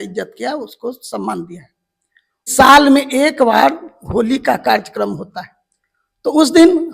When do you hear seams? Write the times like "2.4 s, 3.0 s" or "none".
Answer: 2.5 s